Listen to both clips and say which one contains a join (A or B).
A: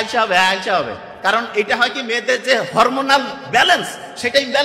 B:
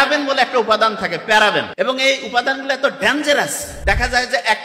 B